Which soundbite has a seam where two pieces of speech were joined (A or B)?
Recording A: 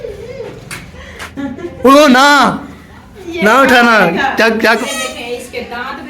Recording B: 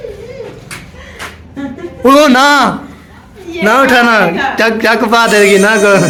A